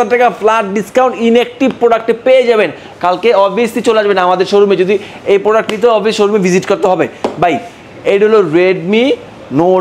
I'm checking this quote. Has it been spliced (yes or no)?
no